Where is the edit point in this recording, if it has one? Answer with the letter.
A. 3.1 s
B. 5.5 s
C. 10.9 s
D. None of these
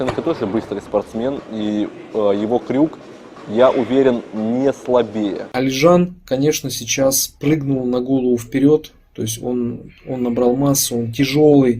B